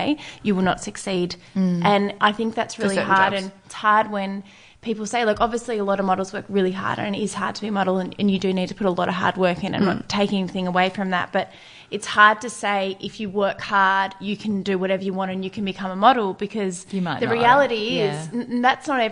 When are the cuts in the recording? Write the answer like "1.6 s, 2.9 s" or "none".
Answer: none